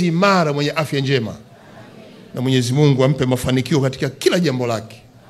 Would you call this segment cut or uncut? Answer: uncut